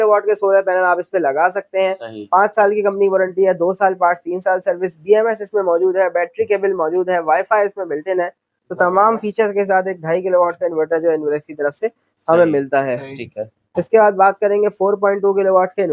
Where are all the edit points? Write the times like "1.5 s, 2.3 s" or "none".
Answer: none